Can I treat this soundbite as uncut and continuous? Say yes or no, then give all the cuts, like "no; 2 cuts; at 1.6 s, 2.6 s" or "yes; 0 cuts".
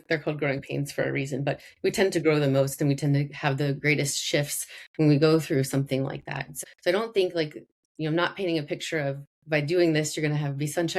no; 1 cut; at 6.7 s